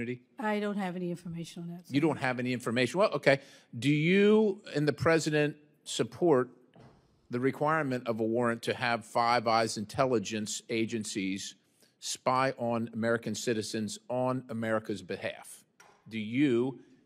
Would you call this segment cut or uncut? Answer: uncut